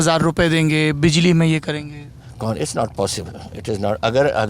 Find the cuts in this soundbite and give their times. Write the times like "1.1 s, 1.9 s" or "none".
none